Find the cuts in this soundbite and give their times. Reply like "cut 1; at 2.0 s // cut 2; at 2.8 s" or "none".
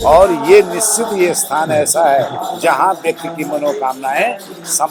none

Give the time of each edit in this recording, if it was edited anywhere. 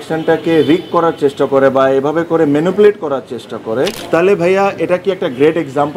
cut 1; at 4.0 s

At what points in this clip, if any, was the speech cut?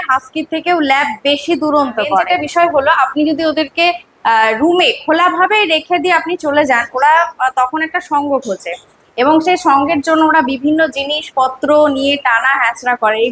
none

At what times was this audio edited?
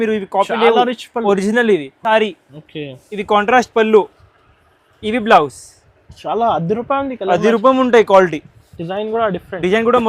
cut 1; at 1.9 s

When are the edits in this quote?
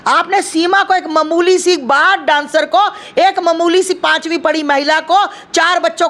none

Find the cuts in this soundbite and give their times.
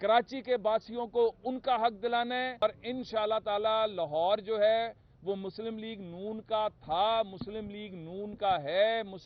cut 1; at 2.6 s

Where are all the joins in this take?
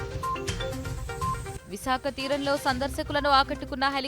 cut 1; at 1.2 s

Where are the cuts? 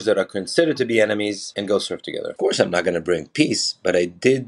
cut 1; at 2.2 s

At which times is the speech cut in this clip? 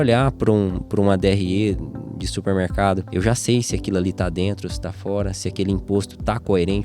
cut 1; at 3.1 s

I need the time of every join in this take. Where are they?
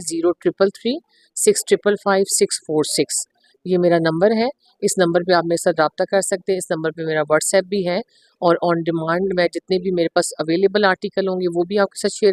none

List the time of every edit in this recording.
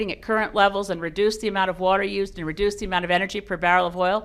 none

